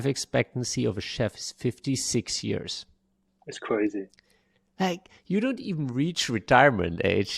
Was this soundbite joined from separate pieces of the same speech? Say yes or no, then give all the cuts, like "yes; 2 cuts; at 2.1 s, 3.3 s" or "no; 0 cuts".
no; 0 cuts